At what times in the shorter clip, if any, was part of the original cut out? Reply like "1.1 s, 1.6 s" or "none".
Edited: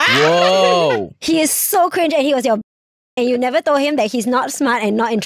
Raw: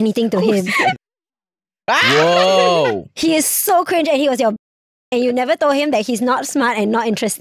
none